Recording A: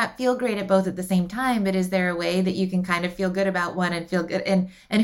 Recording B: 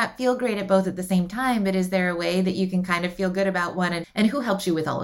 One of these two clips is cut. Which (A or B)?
B